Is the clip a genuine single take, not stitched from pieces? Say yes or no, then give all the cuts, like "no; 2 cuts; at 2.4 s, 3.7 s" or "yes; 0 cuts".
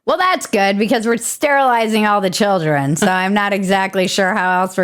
yes; 0 cuts